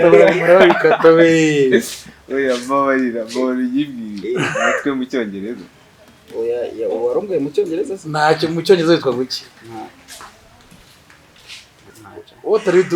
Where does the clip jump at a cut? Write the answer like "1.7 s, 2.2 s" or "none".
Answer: 11.9 s